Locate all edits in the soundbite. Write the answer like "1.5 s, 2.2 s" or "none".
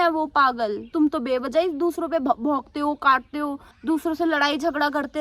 0.9 s, 3.7 s